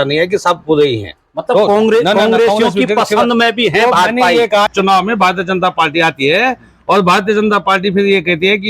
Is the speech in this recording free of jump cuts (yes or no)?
no